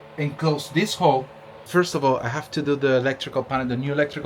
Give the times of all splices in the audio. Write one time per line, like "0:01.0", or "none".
0:01.6